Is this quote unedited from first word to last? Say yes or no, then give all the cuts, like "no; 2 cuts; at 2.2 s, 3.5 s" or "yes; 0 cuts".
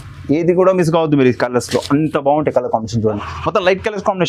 no; 1 cut; at 3.3 s